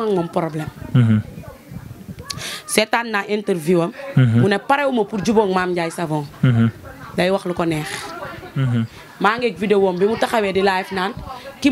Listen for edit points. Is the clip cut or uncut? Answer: cut